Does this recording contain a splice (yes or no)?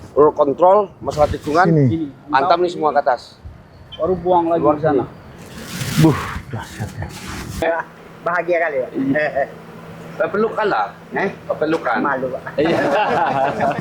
yes